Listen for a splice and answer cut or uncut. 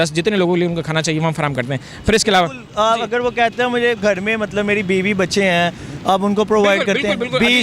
uncut